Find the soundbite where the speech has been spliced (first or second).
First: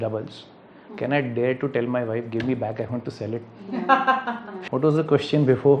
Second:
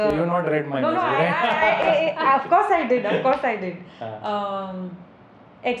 first